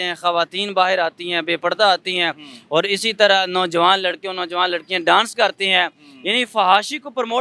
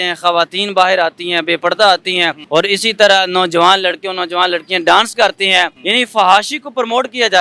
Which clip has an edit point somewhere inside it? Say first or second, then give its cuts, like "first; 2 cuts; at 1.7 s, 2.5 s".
second; 2 cuts; at 2.4 s, 5.8 s